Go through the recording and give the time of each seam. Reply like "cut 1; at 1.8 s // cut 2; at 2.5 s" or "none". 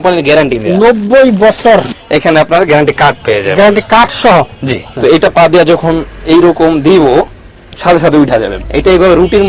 cut 1; at 1.9 s // cut 2; at 4.9 s // cut 3; at 8.6 s

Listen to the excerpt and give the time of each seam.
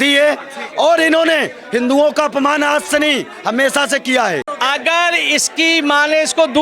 cut 1; at 4.5 s

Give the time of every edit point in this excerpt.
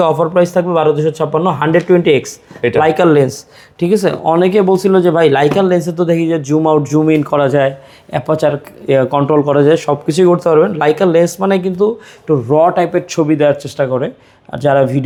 none

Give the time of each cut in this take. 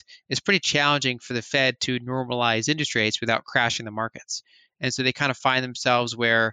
none

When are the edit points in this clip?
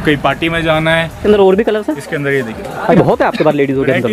cut 1; at 1.2 s // cut 2; at 2.9 s

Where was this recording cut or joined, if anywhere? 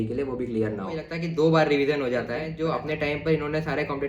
cut 1; at 1.2 s // cut 2; at 2.5 s

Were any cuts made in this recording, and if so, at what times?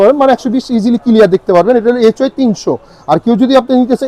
none

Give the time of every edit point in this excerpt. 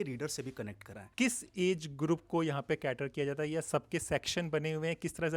cut 1; at 1.1 s

